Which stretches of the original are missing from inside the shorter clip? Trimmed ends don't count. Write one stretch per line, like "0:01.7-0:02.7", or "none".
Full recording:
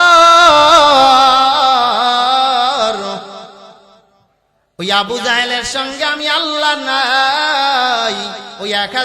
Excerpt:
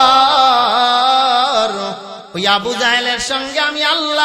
0:03.4-0:04.6

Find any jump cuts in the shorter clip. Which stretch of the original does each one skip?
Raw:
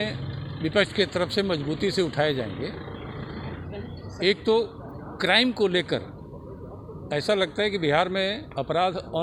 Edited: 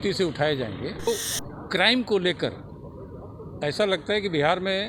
0:02.9-0:04.6

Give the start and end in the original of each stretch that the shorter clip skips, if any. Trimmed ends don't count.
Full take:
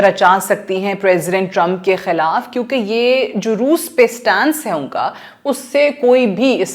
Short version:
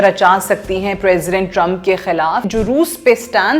0:02.5-0:03.4

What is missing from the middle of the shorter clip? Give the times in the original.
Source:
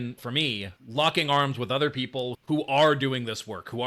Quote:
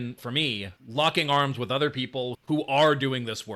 none

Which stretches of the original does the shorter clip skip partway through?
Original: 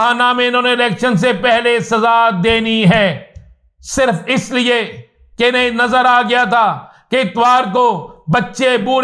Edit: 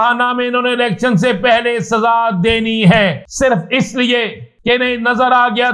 0:03.2-0:03.8
0:05.0-0:05.2

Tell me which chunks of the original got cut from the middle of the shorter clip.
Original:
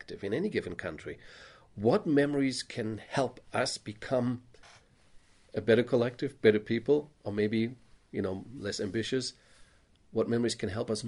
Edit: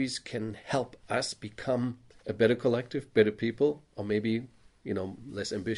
0:04.5-0:05.4

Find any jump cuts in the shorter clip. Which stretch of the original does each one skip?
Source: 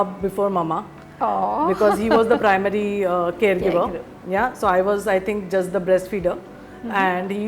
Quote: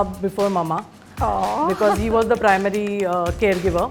none

